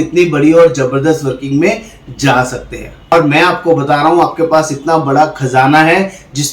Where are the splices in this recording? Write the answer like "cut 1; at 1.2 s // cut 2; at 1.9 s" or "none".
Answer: cut 1; at 3.1 s